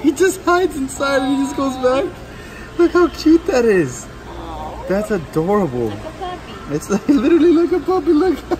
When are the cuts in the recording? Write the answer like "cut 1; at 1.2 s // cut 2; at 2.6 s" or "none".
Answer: none

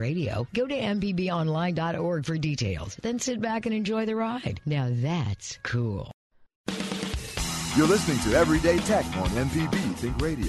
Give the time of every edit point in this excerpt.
cut 1; at 6.4 s

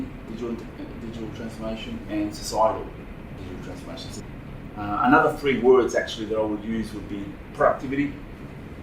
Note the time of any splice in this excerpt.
cut 1; at 4.2 s

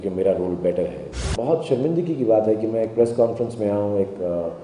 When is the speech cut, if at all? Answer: cut 1; at 1.3 s

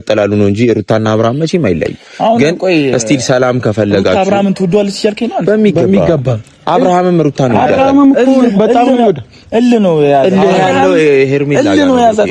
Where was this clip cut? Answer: none

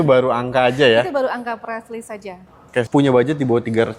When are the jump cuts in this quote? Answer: cut 1; at 2.9 s

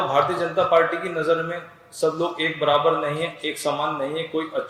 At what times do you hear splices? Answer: none

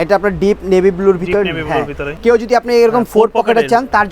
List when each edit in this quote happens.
cut 1; at 2.1 s

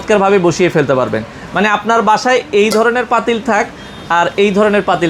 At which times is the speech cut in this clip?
none

